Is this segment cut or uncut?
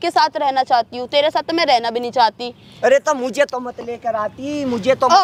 uncut